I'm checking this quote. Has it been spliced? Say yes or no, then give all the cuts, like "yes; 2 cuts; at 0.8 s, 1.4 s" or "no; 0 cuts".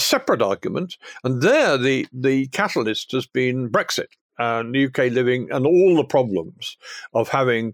no; 0 cuts